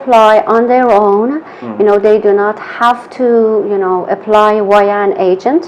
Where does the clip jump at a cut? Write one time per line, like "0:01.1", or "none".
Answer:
none